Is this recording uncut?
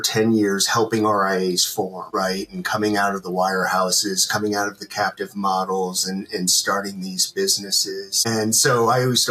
yes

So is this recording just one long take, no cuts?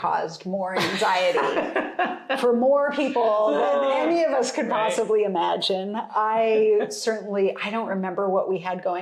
yes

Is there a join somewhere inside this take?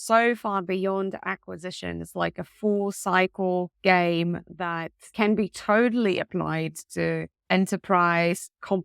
yes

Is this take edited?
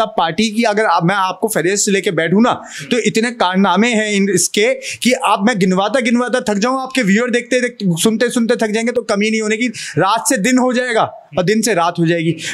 no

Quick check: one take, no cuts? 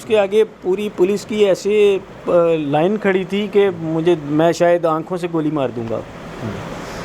yes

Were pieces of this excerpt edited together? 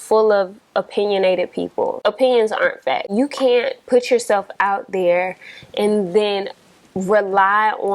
yes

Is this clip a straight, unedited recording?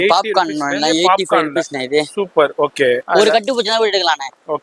no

